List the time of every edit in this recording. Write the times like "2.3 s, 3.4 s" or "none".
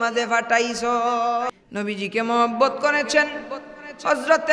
1.5 s